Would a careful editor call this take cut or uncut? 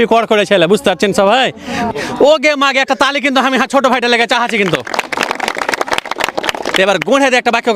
cut